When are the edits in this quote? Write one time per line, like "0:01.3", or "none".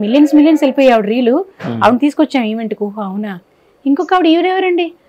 none